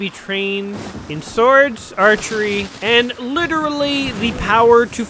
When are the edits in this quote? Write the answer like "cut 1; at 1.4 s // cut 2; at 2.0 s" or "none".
cut 1; at 0.9 s // cut 2; at 2.7 s